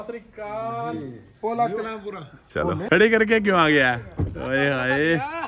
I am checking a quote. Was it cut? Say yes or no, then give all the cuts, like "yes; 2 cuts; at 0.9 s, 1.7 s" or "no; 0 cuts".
yes; 1 cut; at 2.9 s